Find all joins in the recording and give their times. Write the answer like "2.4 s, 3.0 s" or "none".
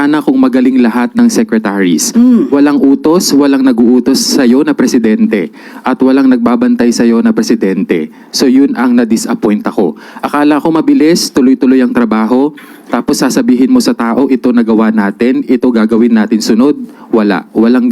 none